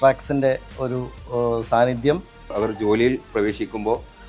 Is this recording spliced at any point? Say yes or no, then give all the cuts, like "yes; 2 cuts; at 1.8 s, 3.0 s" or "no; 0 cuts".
yes; 1 cut; at 2.5 s